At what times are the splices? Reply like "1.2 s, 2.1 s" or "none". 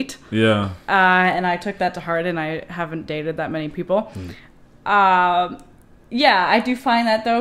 none